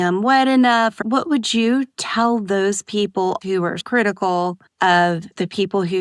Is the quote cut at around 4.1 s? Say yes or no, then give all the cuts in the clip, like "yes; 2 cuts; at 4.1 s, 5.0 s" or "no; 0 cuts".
no; 1 cut; at 1.0 s